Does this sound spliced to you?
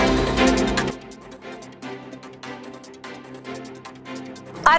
no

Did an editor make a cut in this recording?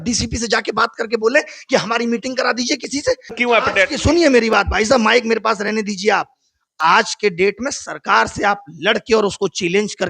yes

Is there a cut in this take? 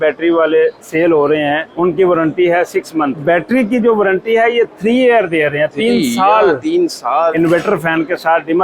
yes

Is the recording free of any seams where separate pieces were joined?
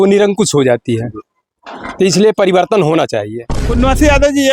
no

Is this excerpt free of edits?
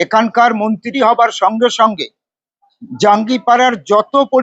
yes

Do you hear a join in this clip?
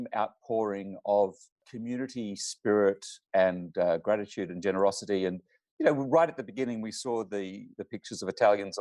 yes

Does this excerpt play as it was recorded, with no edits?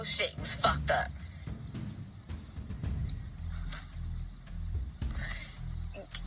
yes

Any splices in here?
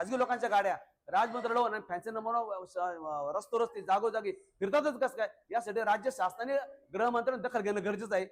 no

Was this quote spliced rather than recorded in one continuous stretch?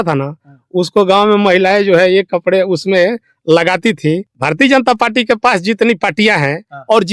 yes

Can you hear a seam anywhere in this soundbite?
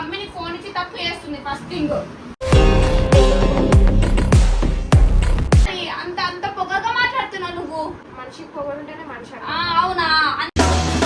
yes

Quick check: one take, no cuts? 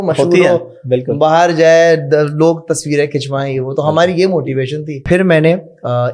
no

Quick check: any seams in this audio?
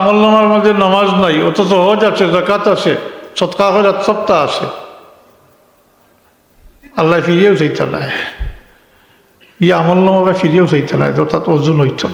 no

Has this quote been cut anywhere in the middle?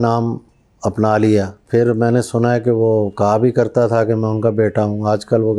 yes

